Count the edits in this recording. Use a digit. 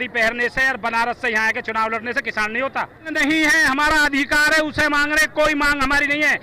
1